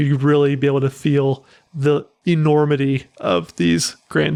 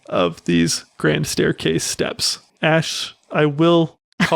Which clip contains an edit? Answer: second; 1 cut; at 2.6 s

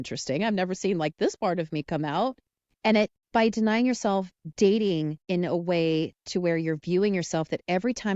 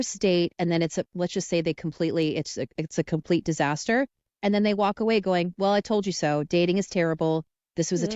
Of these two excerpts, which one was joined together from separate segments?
first; 3 cuts; at 3.2 s, 4.4 s, 5.2 s

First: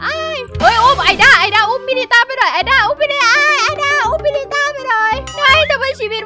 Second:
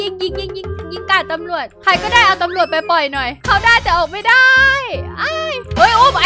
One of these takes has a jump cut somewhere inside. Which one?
second; 1 cut; at 3.4 s

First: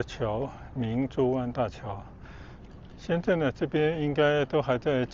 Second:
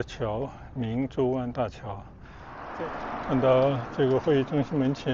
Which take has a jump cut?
second; 1 cut; at 2.6 s

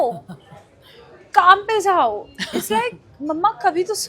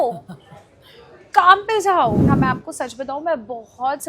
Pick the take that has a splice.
second; 1 cut; at 2.2 s

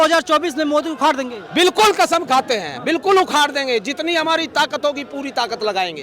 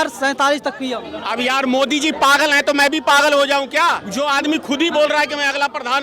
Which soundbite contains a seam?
second; 2 cuts; at 1.1 s, 4.1 s

